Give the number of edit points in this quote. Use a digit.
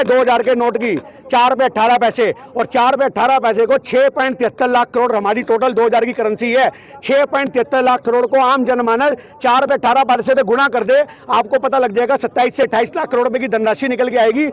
0